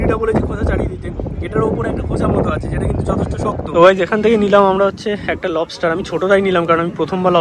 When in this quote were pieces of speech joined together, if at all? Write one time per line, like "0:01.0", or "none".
0:03.8